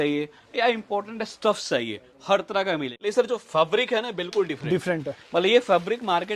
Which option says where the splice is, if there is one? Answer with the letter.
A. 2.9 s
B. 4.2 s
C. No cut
A